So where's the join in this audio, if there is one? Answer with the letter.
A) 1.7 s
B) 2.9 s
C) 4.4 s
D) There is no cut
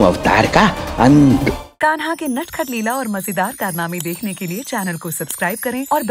A